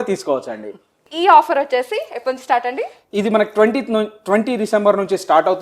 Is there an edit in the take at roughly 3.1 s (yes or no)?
no